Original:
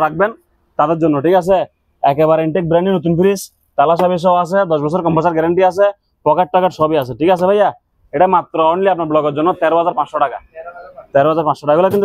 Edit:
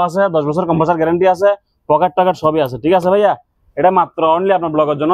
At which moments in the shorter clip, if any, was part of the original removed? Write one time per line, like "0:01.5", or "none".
none